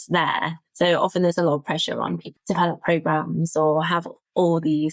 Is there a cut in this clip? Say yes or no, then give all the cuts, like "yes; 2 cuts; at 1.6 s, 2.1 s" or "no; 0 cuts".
yes; 1 cut; at 2.3 s